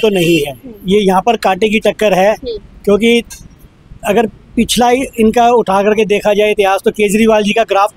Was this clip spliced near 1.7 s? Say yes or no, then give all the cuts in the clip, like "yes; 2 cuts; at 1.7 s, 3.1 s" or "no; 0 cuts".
no; 0 cuts